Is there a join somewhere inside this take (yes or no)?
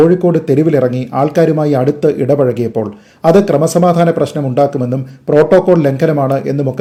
no